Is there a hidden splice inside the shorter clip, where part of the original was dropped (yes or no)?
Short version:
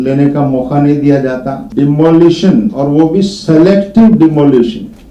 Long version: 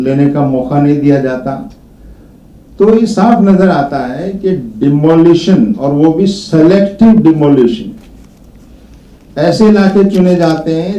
yes